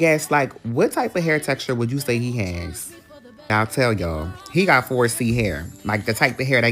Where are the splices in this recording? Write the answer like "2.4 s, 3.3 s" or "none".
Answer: 3.5 s